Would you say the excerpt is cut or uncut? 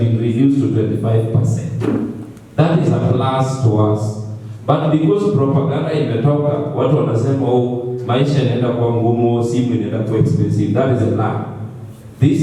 uncut